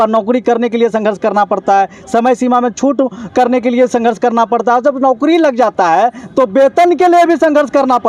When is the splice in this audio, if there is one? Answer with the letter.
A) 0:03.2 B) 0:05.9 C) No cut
C